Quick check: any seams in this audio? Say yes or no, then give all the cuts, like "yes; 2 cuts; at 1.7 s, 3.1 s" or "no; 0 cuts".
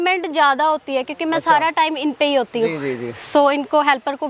no; 0 cuts